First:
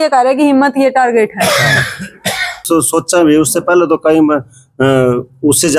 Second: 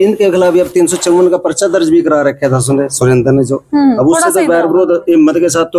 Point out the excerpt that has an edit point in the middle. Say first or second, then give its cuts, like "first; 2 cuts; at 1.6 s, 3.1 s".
first; 1 cut; at 2.6 s